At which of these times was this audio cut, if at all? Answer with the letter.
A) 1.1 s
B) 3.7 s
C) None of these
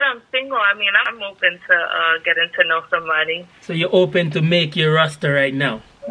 A